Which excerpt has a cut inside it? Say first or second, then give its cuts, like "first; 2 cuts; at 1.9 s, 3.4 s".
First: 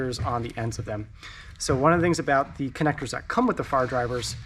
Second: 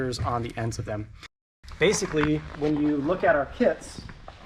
second; 1 cut; at 1.5 s